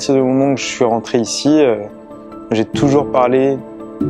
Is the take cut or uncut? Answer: uncut